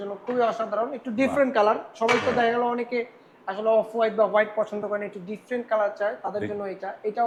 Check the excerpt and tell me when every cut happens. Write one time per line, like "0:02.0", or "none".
none